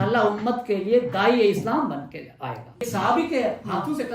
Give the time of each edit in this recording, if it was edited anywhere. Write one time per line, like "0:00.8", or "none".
0:02.9